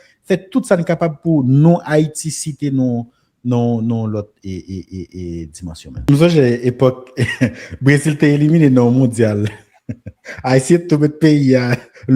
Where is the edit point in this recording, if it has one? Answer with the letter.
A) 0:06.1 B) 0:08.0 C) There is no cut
A